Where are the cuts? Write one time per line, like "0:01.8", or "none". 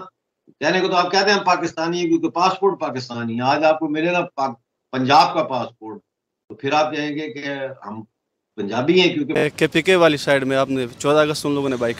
0:09.5

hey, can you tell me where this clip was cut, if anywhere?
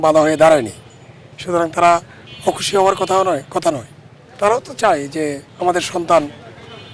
0:05.5

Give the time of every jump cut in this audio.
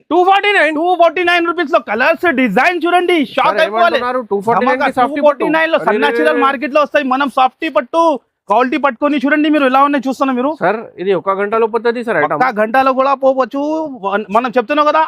none

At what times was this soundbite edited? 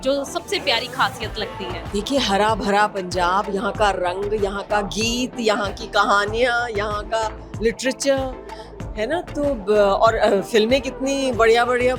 0:01.8

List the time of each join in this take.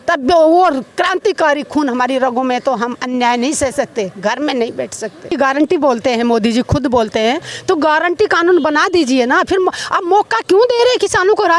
0:05.3

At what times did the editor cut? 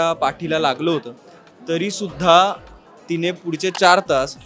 none

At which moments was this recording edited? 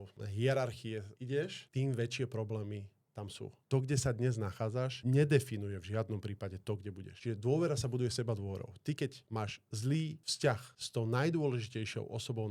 0:01.6
0:03.6
0:05.0
0:07.1

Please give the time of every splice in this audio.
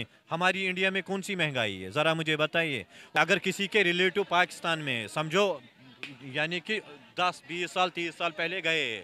0:03.2

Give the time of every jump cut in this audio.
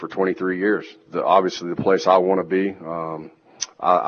0:01.0

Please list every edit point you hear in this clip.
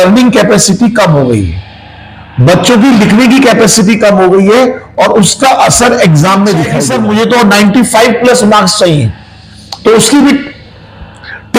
0:06.8

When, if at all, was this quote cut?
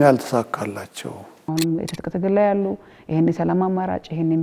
0:01.5

